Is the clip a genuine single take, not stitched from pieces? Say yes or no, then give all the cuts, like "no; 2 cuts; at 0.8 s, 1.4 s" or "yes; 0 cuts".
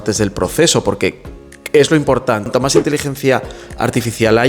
no; 1 cut; at 2.5 s